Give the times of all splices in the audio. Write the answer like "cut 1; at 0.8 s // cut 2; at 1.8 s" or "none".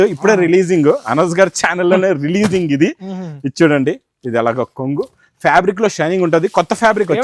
none